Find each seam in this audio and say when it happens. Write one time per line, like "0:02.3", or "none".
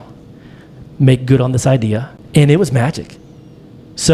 0:02.1